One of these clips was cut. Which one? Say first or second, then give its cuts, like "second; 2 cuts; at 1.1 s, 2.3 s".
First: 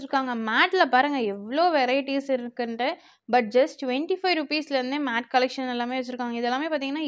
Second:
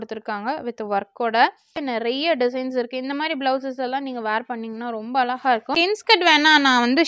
second; 2 cuts; at 1.8 s, 5.7 s